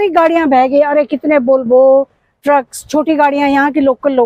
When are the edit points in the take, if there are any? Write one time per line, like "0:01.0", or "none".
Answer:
none

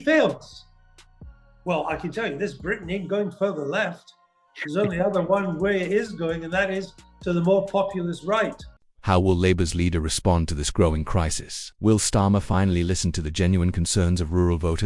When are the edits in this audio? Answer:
none

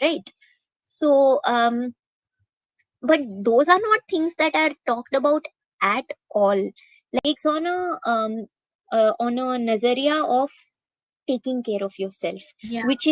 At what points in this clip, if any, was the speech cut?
0:07.2

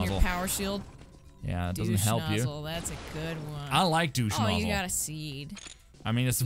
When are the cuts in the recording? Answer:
none

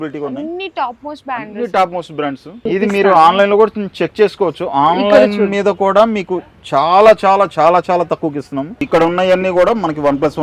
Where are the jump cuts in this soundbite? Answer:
0:02.6
0:08.8

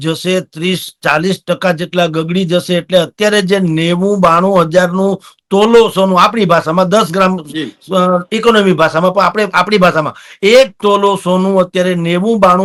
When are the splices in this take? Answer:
none

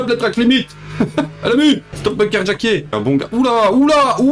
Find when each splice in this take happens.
0:01.9
0:02.9

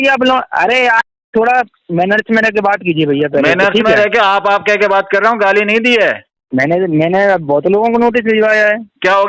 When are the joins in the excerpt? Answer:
0:06.3

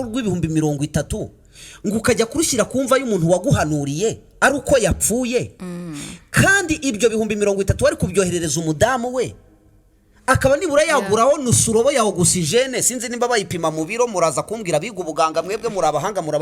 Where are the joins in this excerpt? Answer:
none

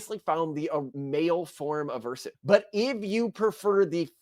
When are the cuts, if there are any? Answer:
0:01.0
0:02.3

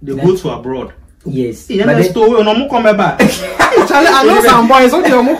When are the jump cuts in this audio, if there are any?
none

